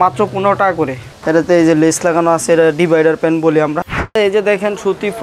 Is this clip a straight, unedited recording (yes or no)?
no